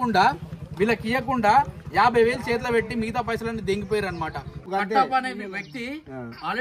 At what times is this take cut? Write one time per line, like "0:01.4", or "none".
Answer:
0:04.6